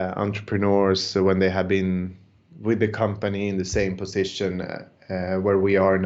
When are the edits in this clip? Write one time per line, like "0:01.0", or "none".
none